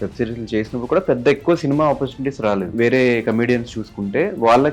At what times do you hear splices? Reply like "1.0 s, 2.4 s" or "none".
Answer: 2.7 s